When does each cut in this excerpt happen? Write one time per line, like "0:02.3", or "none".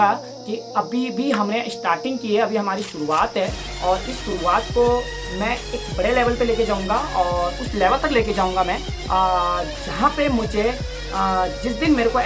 none

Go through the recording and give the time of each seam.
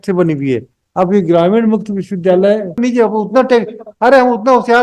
0:02.8

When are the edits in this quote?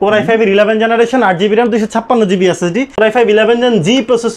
0:02.9

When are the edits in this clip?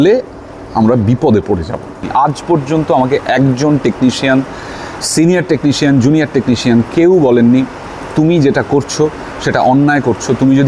0:02.0

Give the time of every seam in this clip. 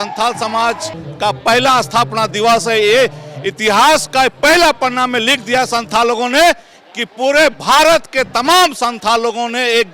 none

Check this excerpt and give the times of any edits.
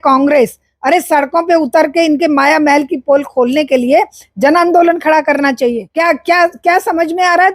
0:05.8

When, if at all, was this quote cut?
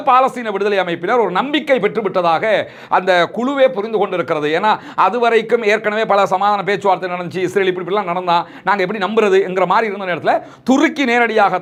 none

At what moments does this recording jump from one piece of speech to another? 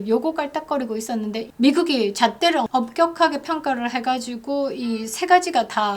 0:01.5
0:02.7

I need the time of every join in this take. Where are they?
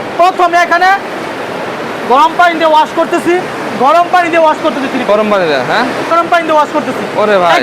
0:03.6
0:06.1

